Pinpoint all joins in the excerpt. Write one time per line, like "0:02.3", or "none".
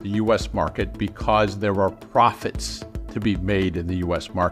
none